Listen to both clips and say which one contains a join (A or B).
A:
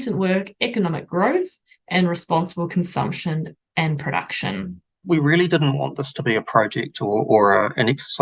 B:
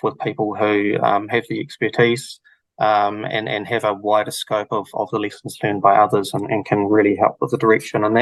A